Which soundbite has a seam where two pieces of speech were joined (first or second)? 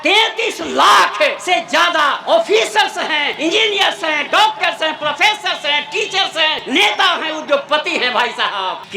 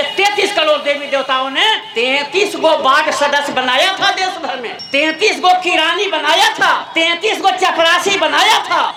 first